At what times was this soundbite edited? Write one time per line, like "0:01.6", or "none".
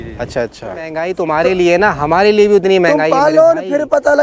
0:01.0